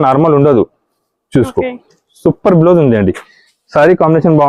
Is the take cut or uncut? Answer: uncut